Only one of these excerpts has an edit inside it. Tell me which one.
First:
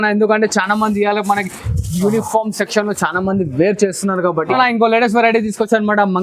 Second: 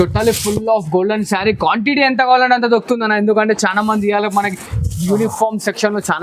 first; 1 cut; at 4.5 s

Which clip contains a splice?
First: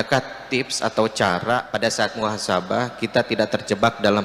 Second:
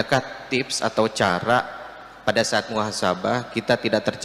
first; 1 cut; at 1.7 s

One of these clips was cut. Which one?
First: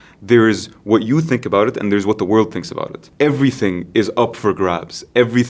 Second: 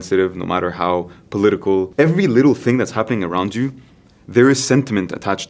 second; 1 cut; at 1.9 s

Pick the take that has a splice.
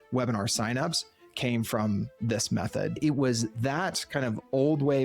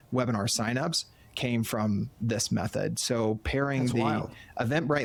first; 1 cut; at 3.0 s

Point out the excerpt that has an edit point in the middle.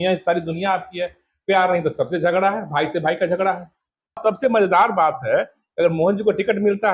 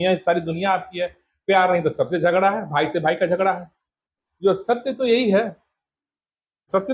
first; 1 cut; at 4.2 s

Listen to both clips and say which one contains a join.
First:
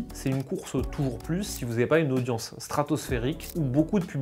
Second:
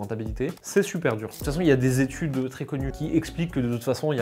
second; 2 cuts; at 1.4 s, 2.9 s

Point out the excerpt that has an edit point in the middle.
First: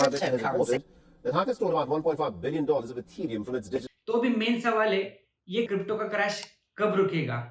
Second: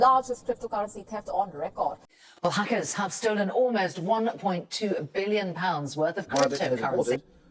first; 1 cut; at 3.9 s

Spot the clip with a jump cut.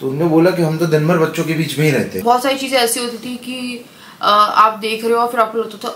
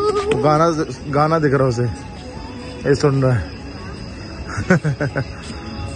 first; 1 cut; at 2.1 s

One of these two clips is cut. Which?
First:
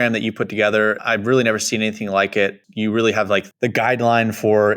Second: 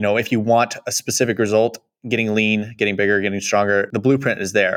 first; 2 cuts; at 1.0 s, 2.7 s

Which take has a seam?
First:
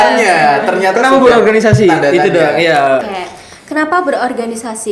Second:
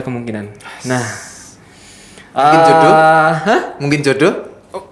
first; 1 cut; at 3.1 s

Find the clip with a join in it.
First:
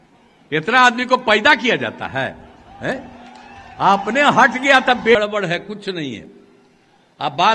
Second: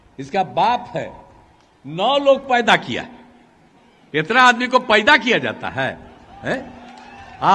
first; 1 cut; at 5.2 s

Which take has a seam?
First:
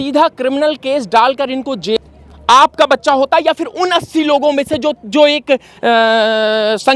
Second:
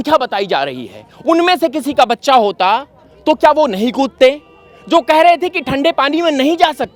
first; 1 cut; at 2.0 s

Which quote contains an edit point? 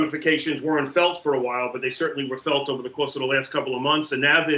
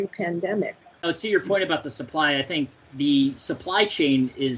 second; 2 cuts; at 1.0 s, 2.8 s

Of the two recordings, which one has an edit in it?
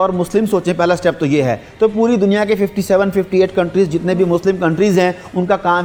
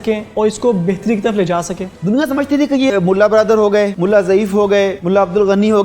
second; 4 cuts; at 1.9 s, 2.9 s, 3.9 s, 5.0 s

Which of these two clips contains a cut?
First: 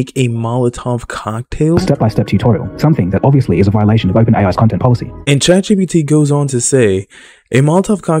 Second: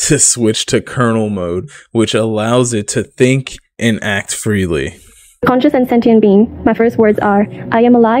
first; 1 cut; at 5.2 s

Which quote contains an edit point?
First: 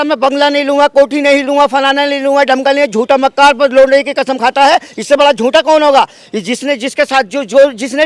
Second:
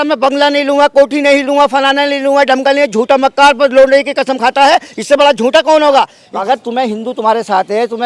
second; 1 cut; at 6.2 s

